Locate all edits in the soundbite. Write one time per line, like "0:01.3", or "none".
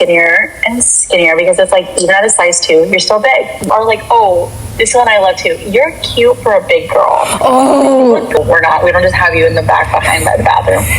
0:03.7
0:08.4